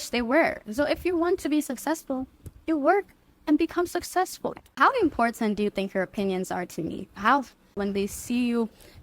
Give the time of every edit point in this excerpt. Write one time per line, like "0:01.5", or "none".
0:04.6
0:07.8